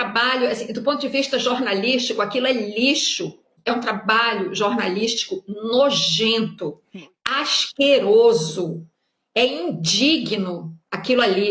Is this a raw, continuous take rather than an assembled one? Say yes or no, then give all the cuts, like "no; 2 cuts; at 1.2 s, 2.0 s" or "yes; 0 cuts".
no; 1 cut; at 3.5 s